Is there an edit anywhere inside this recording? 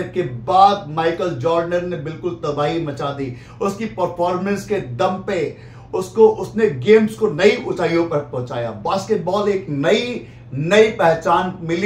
no; 0 cuts

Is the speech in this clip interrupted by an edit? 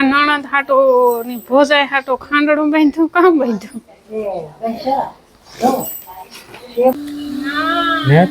yes; 1 cut; at 7.0 s

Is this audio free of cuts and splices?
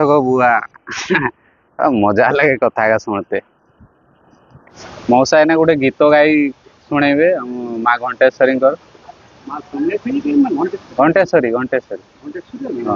no; 1 cut; at 4.8 s

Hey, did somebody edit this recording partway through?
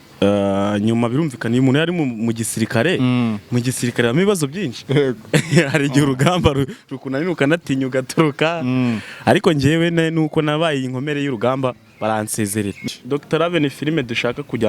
yes; 1 cut; at 12.8 s

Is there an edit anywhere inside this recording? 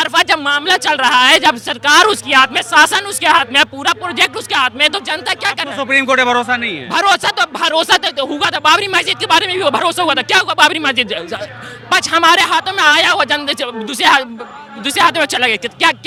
no; 0 cuts

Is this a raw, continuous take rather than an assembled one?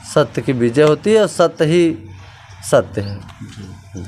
yes; 0 cuts

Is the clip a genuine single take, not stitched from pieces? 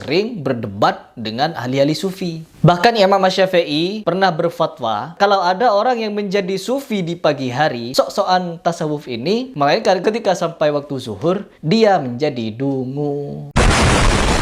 no; 2 cuts; at 5.1 s, 7.9 s

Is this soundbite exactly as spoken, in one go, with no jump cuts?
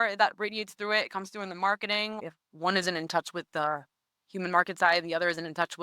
no; 1 cut; at 2.3 s

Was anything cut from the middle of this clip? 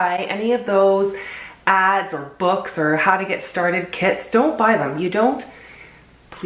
no; 0 cuts

